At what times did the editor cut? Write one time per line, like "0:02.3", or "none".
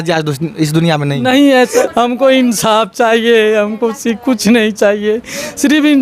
0:01.7